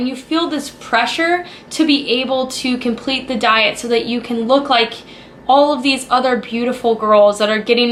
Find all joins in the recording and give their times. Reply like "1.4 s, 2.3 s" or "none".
none